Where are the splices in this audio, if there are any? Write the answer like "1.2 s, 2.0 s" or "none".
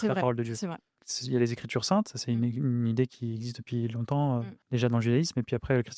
1.0 s, 4.6 s